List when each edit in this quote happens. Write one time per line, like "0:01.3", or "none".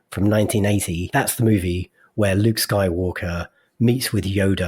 0:01.1